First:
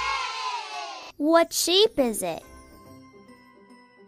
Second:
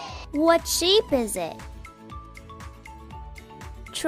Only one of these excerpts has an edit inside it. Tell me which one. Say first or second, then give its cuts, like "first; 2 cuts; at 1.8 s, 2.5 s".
first; 1 cut; at 1.1 s